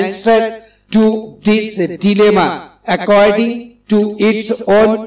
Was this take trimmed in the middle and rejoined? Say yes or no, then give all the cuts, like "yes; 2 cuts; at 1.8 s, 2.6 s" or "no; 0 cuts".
no; 0 cuts